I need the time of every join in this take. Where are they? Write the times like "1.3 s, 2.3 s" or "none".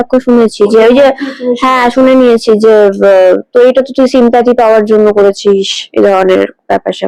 none